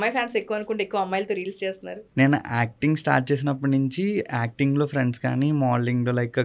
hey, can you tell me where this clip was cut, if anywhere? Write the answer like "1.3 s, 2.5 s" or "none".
2.0 s